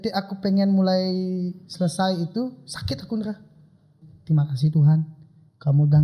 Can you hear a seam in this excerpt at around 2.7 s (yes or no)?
no